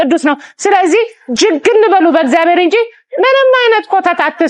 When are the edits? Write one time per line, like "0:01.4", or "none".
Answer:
none